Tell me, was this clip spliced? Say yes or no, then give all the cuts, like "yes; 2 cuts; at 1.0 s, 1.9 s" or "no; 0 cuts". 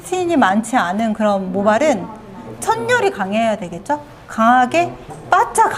no; 0 cuts